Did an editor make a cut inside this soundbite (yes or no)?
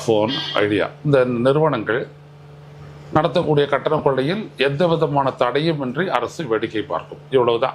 no